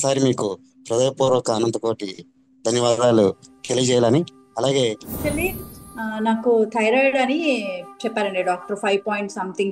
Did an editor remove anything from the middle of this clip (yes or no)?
yes